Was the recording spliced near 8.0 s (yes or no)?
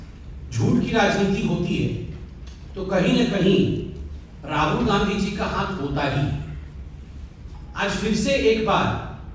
no